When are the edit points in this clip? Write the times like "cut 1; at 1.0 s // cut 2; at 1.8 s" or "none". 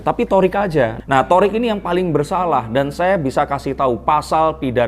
none